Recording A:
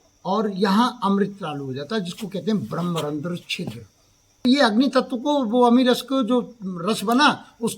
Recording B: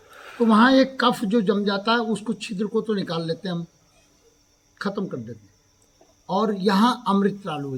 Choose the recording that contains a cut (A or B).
A